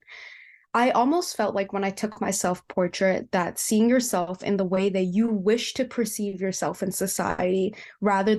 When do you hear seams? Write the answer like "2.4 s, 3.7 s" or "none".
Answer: none